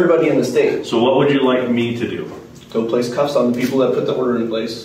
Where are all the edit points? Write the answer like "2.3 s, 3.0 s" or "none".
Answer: none

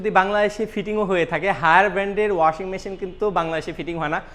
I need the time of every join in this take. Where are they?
none

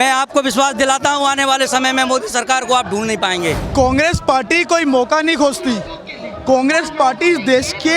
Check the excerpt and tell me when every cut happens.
3.6 s

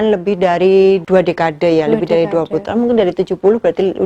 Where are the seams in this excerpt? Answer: 1.0 s, 2.6 s

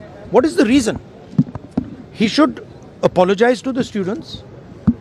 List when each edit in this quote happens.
none

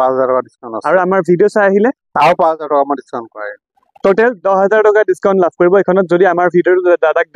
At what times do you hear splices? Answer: none

